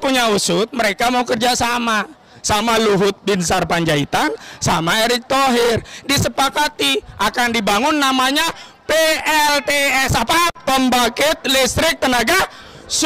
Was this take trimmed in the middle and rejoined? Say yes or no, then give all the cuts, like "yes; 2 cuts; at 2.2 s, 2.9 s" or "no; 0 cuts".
no; 0 cuts